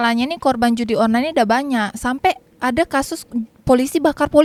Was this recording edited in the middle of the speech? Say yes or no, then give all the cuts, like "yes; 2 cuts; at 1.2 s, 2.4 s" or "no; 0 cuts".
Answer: no; 0 cuts